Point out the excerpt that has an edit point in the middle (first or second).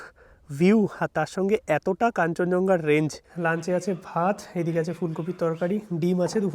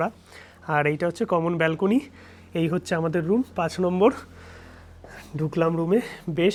first